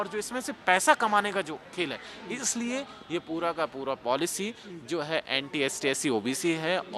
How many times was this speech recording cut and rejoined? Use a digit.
0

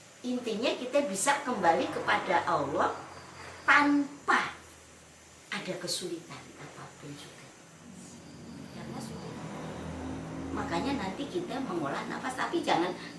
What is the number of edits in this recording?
1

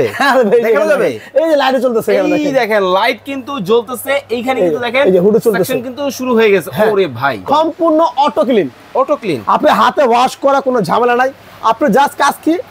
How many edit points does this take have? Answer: 1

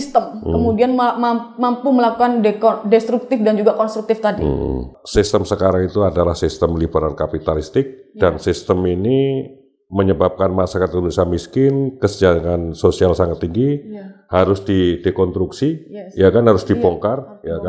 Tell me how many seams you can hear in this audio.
1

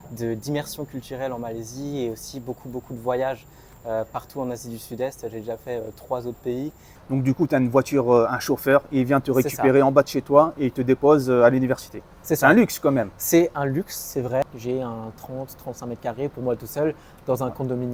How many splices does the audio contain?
2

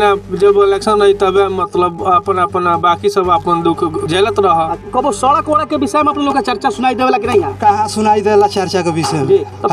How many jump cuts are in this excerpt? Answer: 2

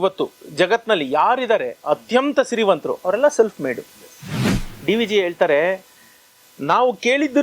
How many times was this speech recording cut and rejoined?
1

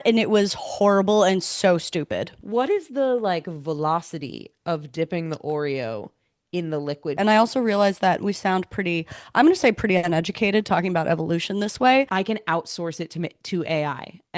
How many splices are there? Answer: 3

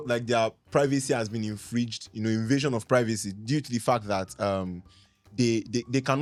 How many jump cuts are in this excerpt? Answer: 0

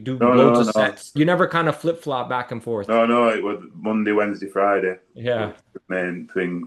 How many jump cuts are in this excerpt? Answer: 2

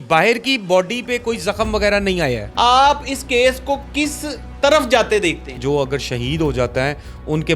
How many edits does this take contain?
2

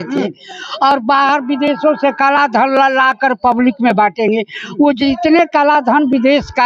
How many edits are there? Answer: 0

